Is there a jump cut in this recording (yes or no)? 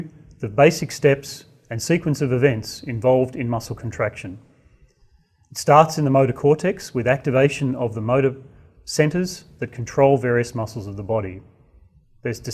yes